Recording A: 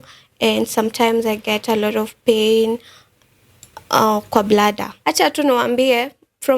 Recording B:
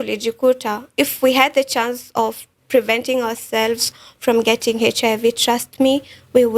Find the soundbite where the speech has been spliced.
A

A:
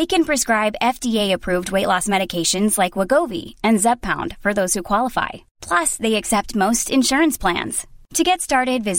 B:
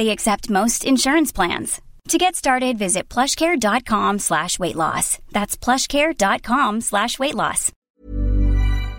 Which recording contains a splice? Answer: B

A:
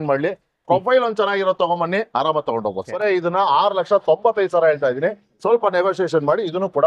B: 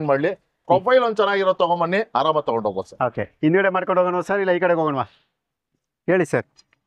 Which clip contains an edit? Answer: A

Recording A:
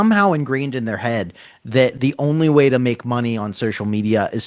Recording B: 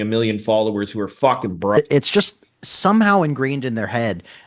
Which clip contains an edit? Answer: B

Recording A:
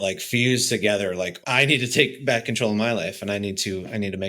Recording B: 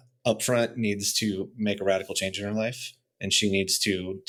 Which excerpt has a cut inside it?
A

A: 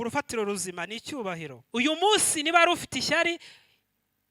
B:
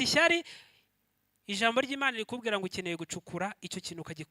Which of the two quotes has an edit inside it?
A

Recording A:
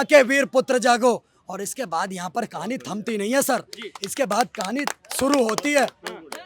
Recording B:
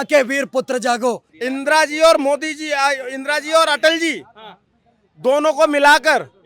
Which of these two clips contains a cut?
B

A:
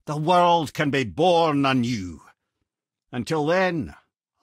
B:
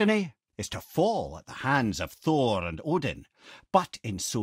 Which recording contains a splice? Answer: A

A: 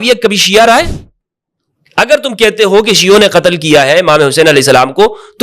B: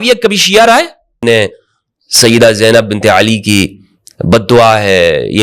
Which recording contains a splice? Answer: B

